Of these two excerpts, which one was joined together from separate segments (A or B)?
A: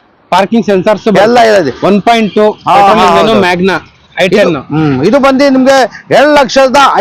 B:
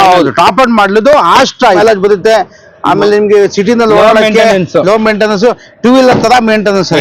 B